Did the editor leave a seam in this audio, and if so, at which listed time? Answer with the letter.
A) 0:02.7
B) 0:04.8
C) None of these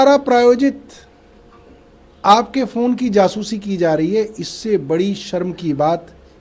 C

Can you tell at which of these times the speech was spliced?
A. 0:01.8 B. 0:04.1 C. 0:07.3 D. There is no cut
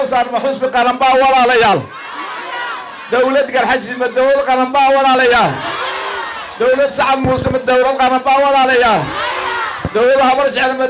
D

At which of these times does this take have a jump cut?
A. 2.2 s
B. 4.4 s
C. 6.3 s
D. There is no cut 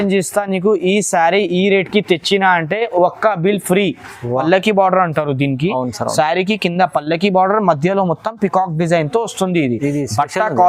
B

